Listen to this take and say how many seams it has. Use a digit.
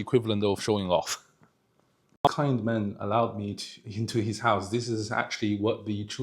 1